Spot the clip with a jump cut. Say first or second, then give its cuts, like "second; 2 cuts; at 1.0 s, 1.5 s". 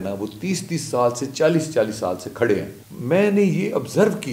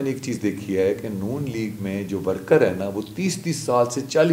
first; 1 cut; at 2.8 s